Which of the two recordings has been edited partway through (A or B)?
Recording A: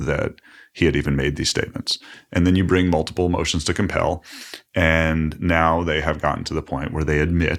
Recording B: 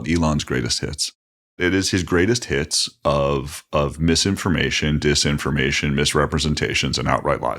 B